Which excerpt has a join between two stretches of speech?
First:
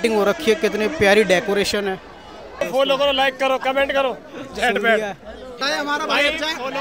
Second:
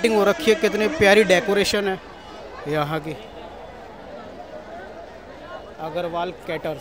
first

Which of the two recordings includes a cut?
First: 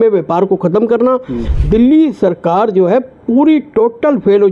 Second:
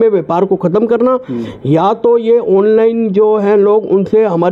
first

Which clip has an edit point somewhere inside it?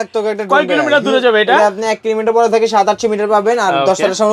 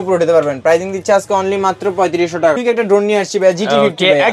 second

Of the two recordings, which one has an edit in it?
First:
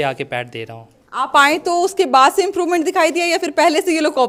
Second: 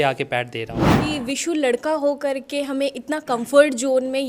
second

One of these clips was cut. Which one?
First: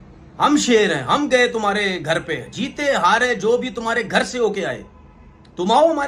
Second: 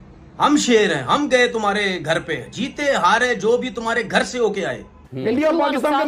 second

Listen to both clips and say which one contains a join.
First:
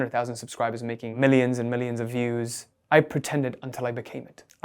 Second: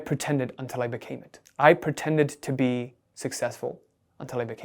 first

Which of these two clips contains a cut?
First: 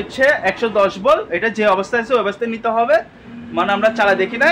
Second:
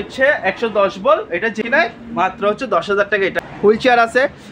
second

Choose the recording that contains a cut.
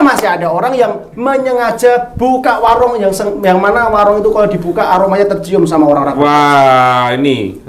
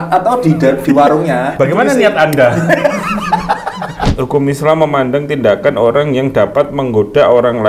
second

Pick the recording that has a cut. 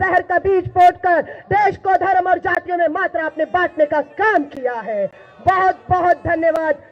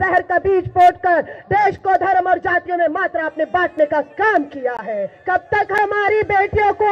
second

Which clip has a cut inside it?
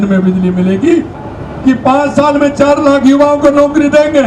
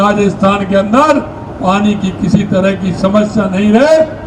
first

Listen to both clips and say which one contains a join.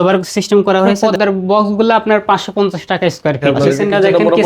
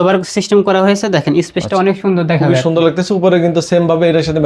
first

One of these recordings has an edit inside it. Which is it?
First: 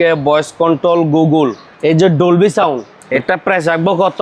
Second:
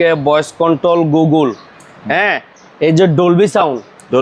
first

